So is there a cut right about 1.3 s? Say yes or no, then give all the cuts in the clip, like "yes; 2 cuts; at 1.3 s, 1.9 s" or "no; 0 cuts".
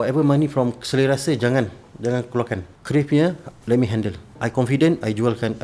no; 2 cuts; at 2.7 s, 4.4 s